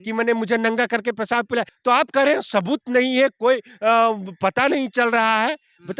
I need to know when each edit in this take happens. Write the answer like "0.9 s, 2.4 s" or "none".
1.7 s